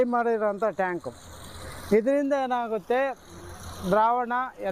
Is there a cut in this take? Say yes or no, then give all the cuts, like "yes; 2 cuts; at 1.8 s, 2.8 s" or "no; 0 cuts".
no; 0 cuts